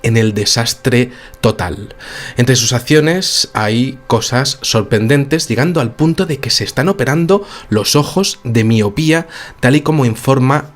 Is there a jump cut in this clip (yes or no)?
yes